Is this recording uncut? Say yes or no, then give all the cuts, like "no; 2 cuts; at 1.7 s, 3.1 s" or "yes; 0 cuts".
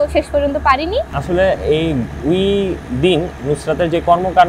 no; 1 cut; at 1.1 s